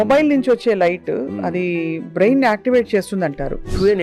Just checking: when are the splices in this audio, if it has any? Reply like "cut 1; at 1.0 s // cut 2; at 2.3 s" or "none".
none